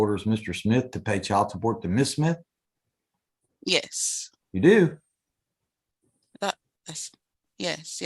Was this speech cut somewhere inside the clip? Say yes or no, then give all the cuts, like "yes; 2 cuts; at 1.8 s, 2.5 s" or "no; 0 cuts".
no; 0 cuts